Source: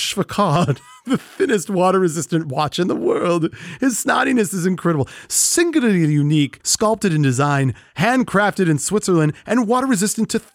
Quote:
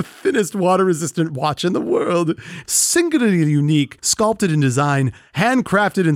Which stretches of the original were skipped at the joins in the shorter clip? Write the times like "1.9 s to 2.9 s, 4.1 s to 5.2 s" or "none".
3.7 s to 5.1 s